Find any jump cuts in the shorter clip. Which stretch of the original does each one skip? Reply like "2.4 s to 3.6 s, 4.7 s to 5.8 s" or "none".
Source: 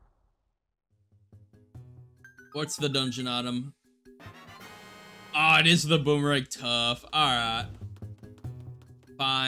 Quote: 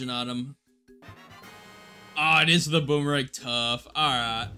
none